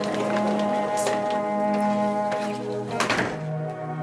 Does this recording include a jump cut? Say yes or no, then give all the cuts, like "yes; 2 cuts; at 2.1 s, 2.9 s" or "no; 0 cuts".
no; 0 cuts